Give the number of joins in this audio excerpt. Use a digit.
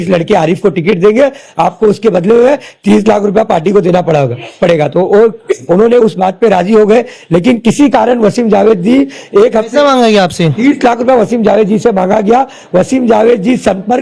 0